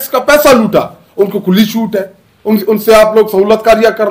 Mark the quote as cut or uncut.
uncut